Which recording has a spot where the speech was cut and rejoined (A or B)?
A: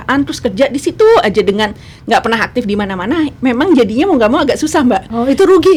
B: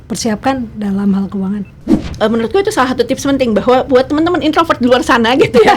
B